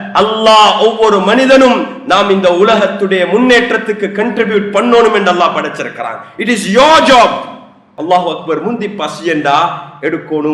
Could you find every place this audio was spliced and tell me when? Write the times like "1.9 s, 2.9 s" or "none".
7.9 s